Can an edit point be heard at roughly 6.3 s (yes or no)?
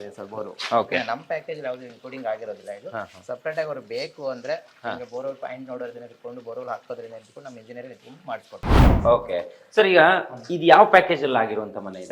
no